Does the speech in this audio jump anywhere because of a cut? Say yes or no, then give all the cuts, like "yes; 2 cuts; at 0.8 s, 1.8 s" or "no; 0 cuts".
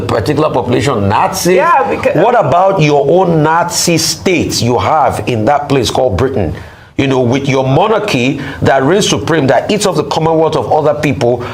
no; 0 cuts